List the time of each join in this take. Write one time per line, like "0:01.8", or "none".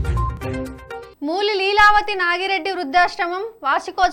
0:01.1